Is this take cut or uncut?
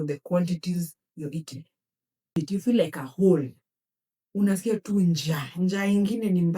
cut